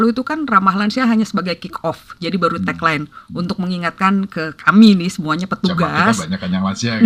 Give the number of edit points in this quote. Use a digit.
0